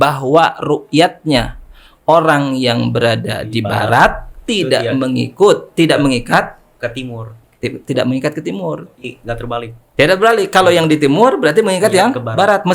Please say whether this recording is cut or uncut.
uncut